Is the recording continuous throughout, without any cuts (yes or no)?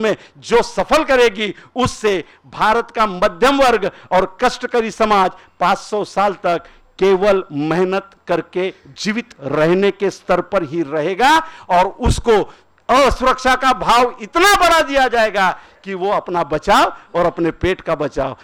yes